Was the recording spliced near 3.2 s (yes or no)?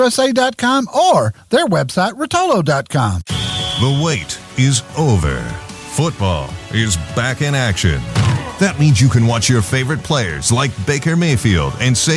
yes